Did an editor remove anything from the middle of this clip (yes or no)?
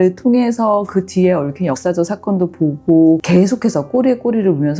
yes